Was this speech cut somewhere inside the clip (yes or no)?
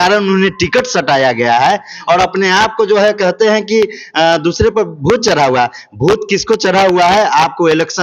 no